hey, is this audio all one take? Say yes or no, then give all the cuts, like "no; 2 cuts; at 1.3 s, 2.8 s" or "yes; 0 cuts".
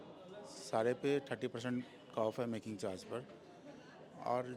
yes; 0 cuts